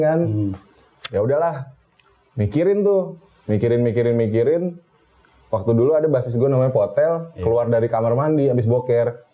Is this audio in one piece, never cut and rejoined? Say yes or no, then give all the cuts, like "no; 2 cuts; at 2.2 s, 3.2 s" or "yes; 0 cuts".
yes; 0 cuts